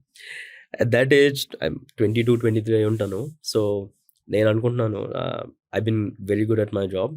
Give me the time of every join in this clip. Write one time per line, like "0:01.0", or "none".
none